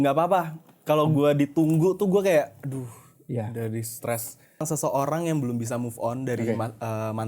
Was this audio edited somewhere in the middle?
yes; 1 cut; at 4.7 s

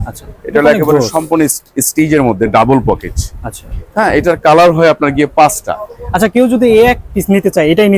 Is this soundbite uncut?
yes; 0 cuts

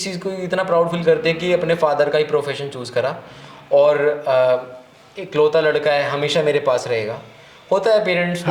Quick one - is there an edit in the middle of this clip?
no; 0 cuts

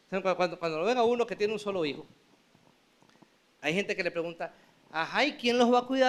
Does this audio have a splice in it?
no; 0 cuts

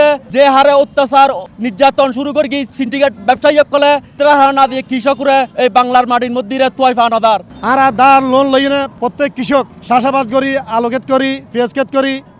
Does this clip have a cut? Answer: yes; 6 cuts; at 2.6 s, 4.1 s, 5.5 s, 7.5 s, 8.9 s, 9.8 s

